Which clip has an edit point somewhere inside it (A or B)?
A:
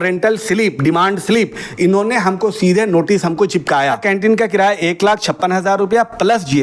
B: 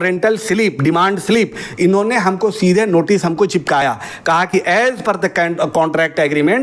A